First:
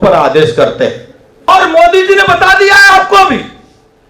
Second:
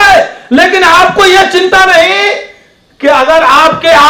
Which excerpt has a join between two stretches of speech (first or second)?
first